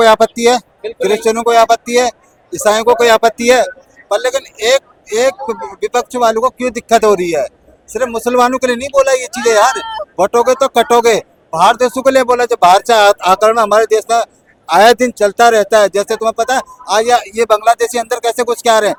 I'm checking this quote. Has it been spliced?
no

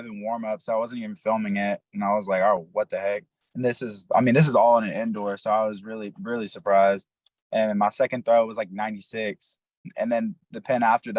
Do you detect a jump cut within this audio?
yes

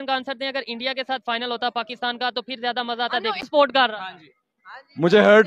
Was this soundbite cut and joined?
no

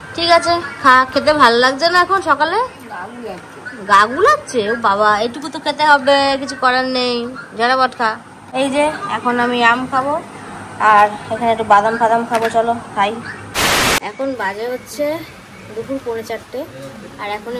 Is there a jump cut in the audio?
no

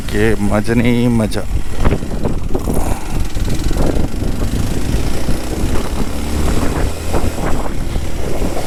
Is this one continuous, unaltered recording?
yes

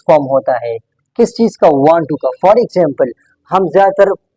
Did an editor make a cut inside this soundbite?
no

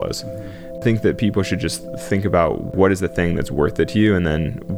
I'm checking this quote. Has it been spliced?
yes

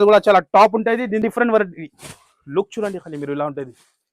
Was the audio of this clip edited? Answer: yes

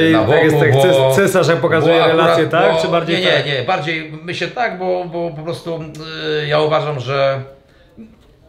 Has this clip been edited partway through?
no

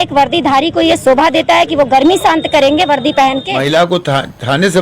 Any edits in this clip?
yes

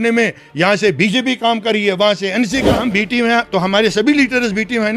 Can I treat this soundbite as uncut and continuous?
no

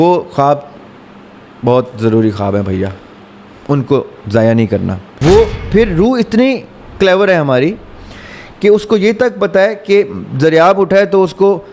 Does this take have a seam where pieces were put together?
yes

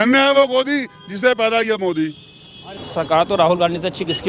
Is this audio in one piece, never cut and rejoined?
no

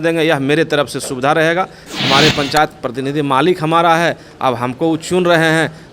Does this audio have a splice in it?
yes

